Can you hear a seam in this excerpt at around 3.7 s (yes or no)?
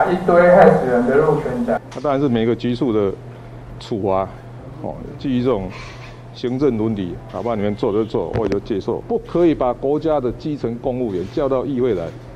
no